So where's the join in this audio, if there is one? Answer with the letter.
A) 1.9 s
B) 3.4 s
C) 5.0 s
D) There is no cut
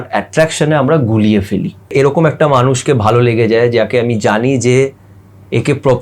A